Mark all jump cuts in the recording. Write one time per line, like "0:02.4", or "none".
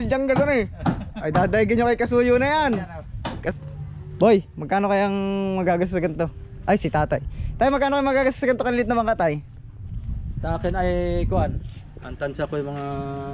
0:03.5